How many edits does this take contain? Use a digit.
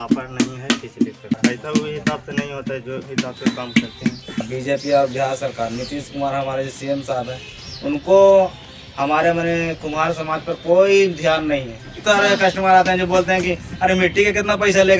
3